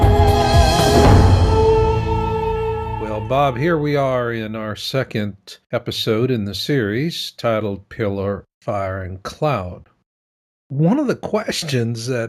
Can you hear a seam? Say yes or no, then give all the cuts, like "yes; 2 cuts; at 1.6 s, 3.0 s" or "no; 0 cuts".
yes; 1 cut; at 2.9 s